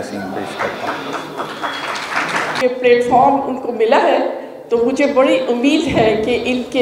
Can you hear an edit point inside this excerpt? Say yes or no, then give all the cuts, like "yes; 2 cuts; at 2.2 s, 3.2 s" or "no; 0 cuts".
yes; 1 cut; at 2.6 s